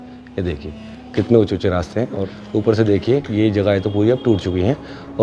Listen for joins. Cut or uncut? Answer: cut